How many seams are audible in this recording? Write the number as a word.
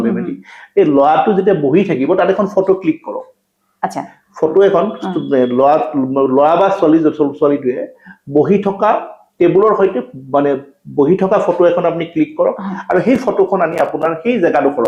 zero